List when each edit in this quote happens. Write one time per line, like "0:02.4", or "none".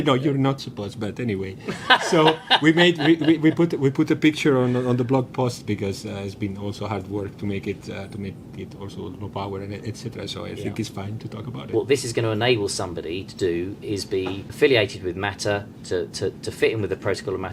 0:11.6
0:14.5

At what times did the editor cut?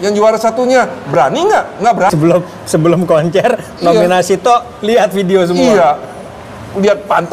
0:02.1

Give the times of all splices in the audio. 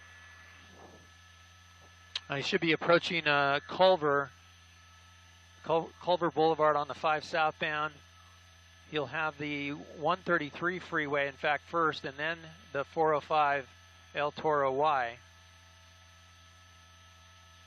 none

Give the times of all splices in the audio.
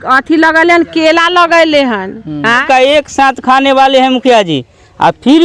0:02.6

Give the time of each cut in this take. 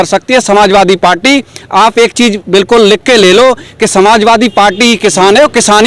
none

